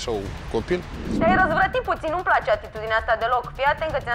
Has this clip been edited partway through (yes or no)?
yes